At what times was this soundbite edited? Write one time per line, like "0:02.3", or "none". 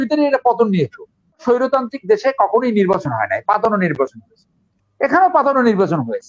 0:01.4